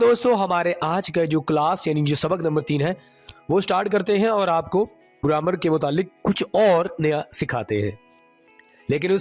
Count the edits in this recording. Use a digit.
1